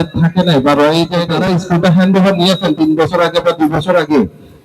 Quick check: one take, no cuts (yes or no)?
no